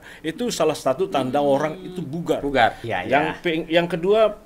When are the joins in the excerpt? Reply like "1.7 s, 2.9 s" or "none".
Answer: 2.8 s